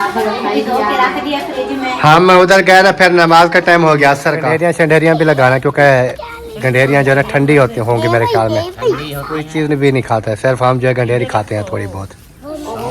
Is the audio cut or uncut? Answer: cut